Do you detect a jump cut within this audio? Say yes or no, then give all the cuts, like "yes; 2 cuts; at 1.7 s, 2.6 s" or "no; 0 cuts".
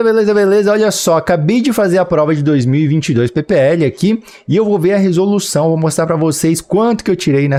no; 0 cuts